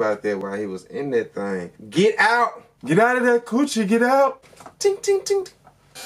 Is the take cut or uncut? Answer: cut